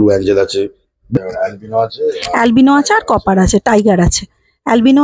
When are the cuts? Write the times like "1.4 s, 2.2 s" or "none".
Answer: 1.2 s